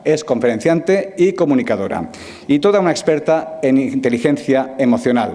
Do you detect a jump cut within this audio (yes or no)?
no